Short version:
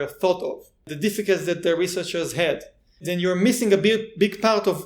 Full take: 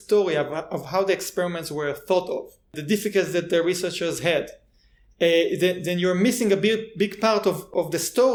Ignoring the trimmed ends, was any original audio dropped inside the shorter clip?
yes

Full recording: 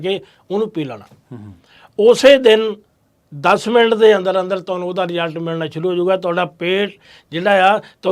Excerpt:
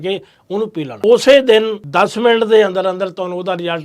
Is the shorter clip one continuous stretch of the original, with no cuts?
no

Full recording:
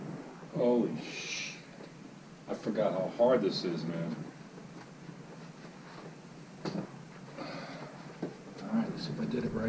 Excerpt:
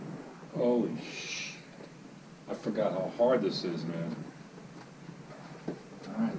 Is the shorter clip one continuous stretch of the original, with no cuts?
no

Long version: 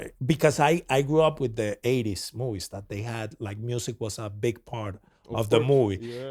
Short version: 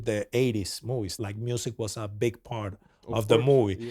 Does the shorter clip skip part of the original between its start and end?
yes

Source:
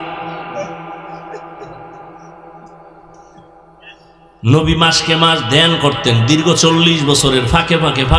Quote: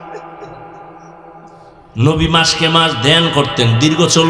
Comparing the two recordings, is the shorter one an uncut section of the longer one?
no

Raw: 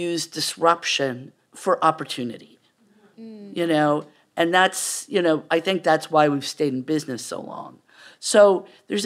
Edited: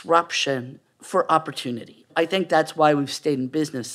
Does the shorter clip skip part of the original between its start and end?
yes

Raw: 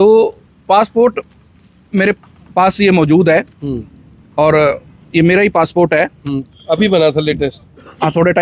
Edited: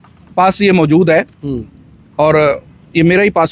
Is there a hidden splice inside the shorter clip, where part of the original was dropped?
no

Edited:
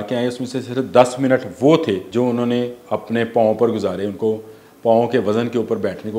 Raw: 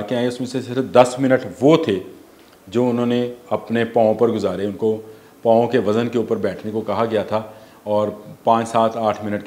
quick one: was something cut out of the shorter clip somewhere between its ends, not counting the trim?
yes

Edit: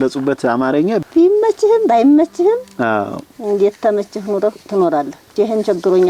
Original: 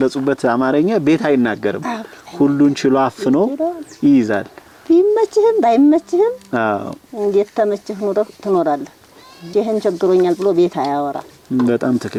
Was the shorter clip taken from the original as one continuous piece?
no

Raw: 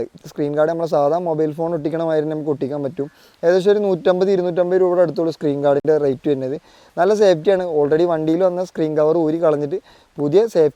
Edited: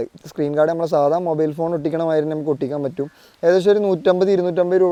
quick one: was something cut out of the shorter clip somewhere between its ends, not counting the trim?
no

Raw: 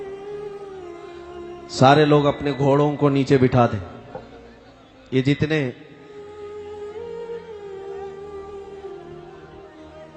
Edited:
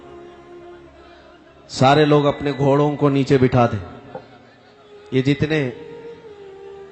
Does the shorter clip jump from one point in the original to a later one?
yes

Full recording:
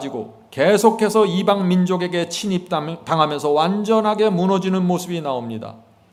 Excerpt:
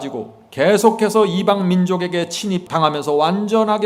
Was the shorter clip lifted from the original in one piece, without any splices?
no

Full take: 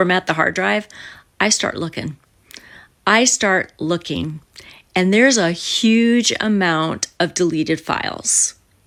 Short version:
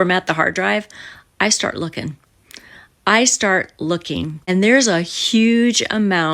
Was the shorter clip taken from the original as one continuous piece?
no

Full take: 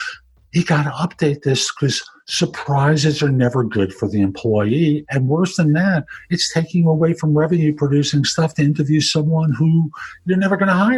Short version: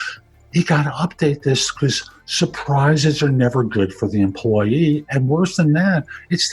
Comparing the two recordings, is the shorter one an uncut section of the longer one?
yes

